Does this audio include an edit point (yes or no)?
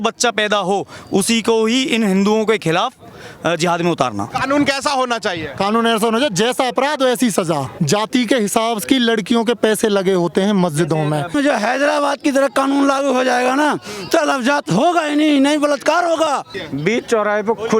yes